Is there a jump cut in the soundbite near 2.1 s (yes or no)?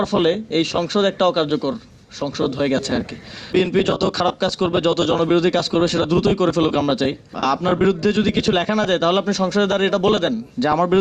no